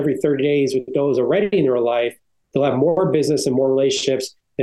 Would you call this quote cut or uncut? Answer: uncut